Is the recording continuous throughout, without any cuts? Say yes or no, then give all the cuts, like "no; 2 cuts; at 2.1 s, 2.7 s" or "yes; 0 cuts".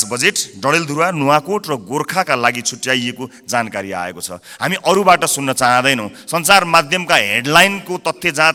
yes; 0 cuts